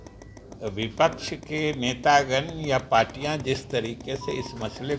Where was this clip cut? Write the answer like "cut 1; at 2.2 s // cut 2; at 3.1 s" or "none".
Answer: none